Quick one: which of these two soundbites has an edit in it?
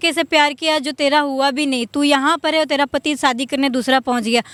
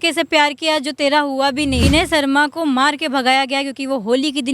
second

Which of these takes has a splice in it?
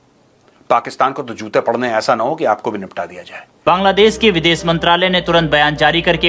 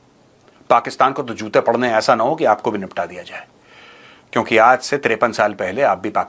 first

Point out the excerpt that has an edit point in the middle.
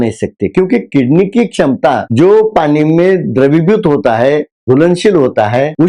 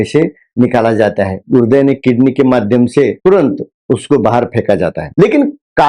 second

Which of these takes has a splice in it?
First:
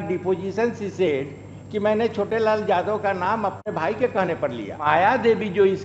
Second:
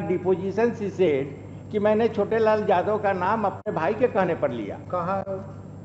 first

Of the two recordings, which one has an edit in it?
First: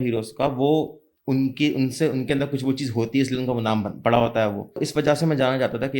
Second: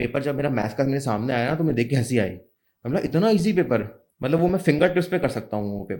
first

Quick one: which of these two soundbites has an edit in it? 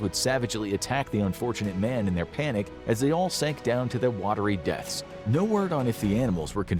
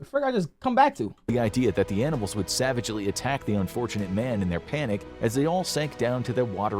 second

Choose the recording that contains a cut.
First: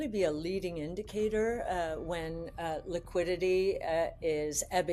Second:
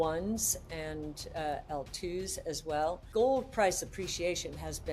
second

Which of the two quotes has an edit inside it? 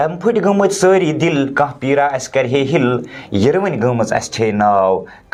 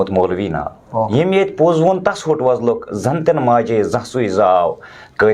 second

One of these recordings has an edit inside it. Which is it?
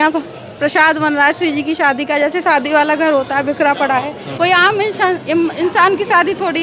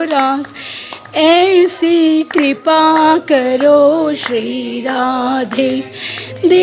first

